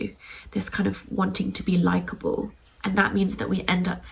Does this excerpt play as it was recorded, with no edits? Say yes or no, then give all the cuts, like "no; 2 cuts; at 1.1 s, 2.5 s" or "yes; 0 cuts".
no; 1 cut; at 2.6 s